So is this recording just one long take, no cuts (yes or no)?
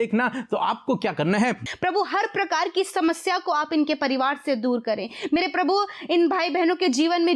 no